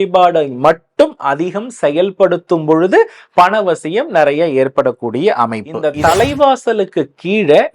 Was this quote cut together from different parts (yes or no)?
yes